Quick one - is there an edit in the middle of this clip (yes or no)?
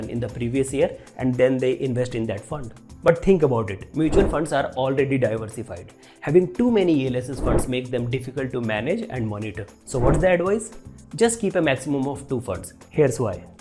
no